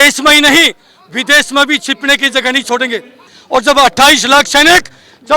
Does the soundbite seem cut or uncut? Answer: cut